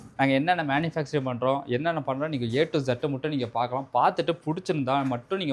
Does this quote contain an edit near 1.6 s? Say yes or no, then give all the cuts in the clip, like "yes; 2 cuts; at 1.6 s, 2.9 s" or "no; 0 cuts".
no; 0 cuts